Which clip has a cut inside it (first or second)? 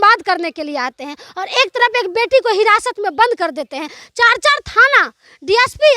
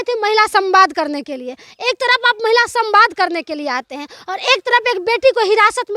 first